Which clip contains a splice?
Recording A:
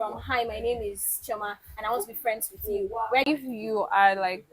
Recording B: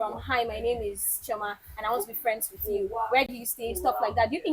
A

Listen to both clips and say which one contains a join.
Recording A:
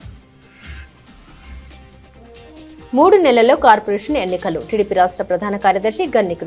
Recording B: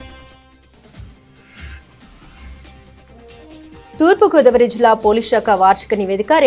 A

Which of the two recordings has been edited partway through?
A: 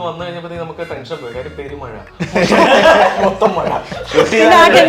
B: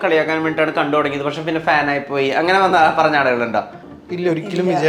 B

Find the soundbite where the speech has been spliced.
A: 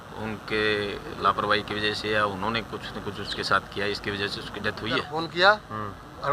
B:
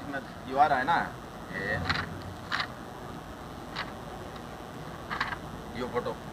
A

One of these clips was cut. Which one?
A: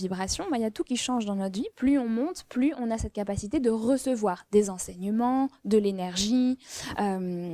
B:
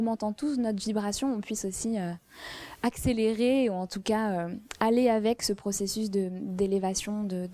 A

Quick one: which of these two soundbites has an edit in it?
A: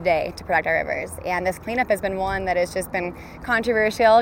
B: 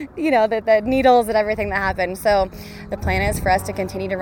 B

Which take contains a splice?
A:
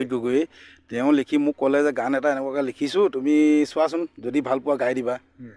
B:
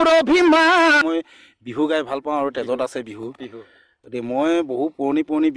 B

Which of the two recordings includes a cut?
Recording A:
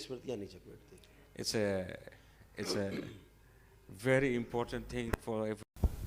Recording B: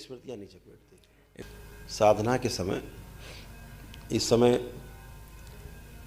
B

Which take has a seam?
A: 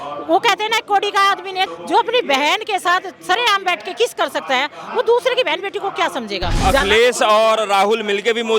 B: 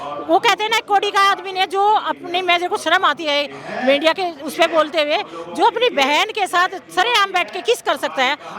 A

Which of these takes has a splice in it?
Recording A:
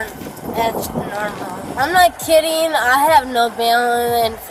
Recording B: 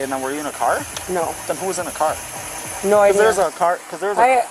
A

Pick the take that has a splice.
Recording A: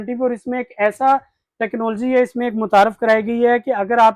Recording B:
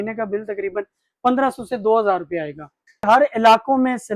B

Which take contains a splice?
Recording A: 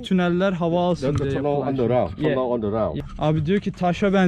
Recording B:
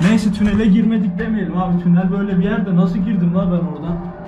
A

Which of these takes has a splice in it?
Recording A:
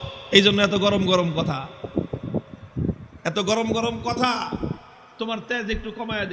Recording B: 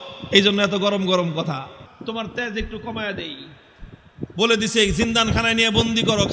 B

